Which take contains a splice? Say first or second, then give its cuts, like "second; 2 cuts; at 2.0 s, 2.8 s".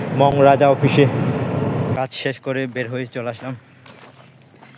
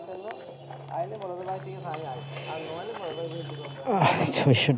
first; 1 cut; at 2.0 s